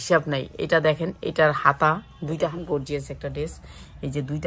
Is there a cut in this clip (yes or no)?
yes